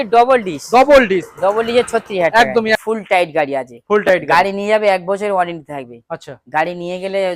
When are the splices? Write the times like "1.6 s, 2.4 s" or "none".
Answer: 2.8 s